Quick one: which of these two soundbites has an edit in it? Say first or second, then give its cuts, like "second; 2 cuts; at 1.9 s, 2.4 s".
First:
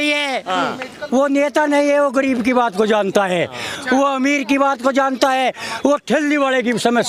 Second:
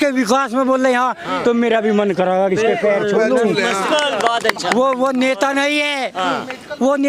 second; 1 cut; at 3.8 s